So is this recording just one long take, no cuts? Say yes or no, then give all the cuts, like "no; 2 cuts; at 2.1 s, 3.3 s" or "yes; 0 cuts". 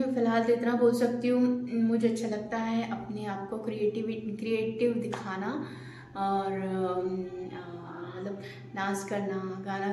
yes; 0 cuts